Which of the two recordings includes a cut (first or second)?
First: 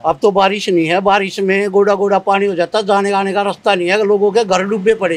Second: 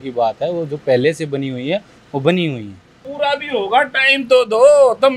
second